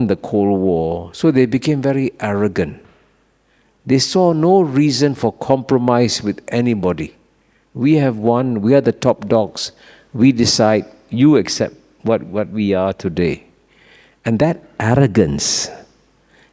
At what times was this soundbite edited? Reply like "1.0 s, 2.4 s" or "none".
none

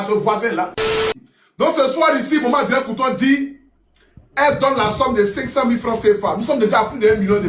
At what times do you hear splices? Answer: 1.1 s

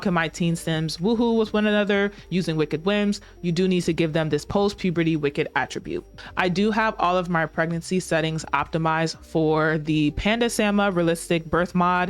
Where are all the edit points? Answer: 6.3 s

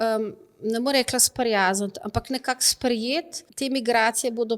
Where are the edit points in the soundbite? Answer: 3.4 s

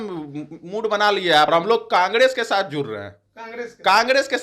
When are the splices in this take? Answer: 1.5 s

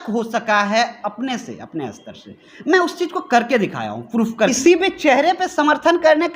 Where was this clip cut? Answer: 4.5 s

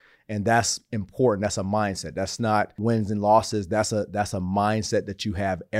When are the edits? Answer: 2.8 s

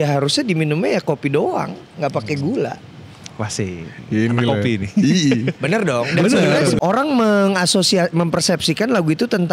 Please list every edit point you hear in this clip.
6.8 s

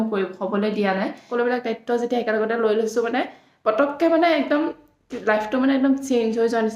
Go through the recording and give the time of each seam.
1.2 s

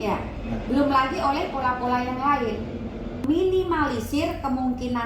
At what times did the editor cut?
3.2 s

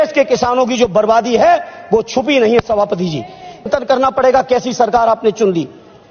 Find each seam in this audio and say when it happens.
3.7 s

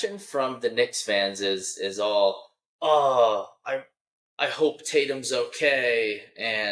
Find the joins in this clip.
none

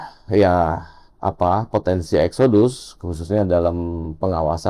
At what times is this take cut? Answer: none

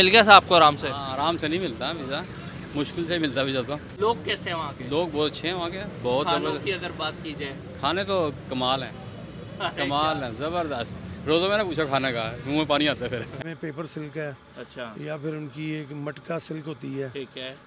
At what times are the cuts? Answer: 3.9 s, 13.4 s

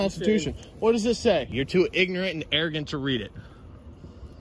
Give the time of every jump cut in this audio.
1.5 s

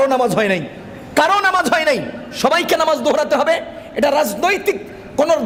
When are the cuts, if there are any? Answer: none

